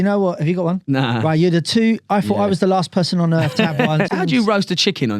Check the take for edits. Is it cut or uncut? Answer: cut